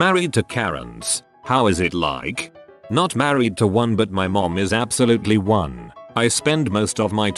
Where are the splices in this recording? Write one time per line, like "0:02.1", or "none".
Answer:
0:02.8